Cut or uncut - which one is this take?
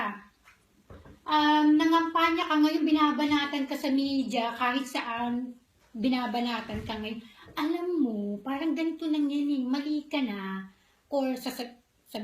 cut